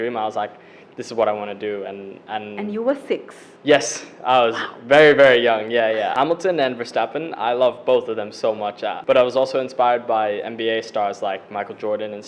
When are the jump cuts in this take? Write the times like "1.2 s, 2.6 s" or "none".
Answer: 6.2 s, 8.9 s